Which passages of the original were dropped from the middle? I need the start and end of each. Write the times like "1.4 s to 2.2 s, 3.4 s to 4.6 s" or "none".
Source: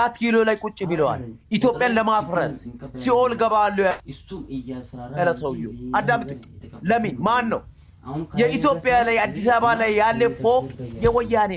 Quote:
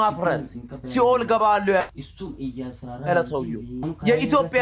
5.8 s to 8.0 s